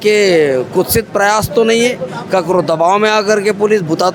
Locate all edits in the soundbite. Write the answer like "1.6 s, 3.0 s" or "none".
none